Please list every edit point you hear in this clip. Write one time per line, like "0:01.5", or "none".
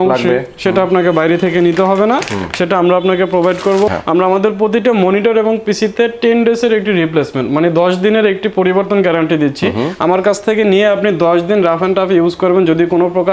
0:03.9